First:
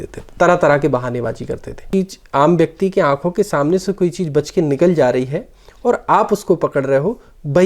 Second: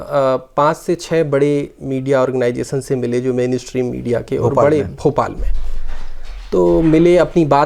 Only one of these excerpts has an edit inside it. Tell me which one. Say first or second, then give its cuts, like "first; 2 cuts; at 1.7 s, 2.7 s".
first; 1 cut; at 1.9 s